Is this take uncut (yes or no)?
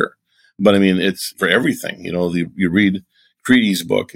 no